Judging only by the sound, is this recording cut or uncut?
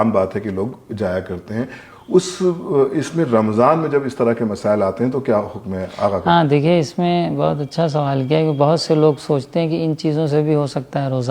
uncut